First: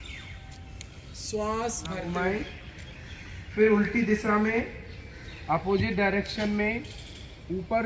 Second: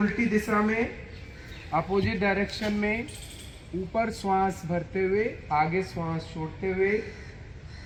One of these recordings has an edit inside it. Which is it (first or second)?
first